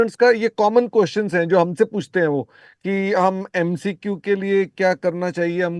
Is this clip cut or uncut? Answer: uncut